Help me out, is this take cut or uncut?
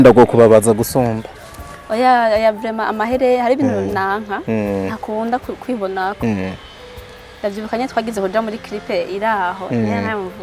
uncut